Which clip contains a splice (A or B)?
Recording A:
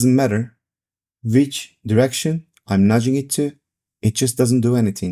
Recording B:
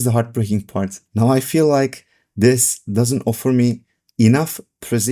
B